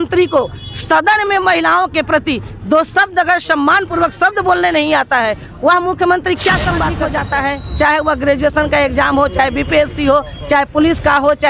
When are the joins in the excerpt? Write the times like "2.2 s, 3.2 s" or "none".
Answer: 7.1 s